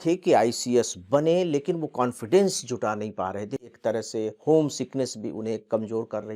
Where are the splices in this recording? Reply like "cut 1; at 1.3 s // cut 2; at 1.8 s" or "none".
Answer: cut 1; at 3.6 s